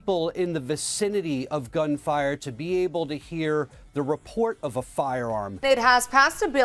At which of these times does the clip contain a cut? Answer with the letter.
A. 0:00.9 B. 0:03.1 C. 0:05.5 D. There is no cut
C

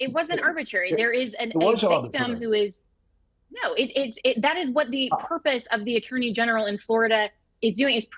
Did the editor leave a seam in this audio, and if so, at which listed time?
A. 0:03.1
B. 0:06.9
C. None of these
C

